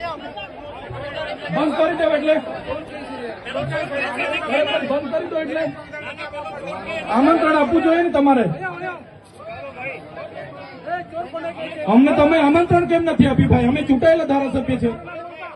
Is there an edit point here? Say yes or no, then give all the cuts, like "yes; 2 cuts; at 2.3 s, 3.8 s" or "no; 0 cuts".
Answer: no; 0 cuts